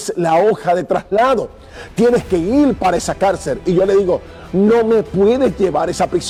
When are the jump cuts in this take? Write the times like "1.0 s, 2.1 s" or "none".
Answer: none